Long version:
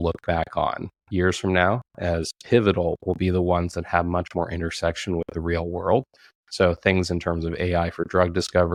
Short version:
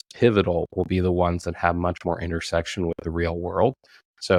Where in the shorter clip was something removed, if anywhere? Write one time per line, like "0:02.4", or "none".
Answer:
none